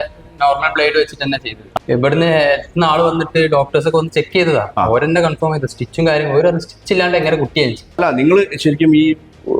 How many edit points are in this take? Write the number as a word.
two